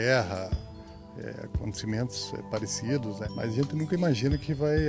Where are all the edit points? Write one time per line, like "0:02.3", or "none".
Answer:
0:03.2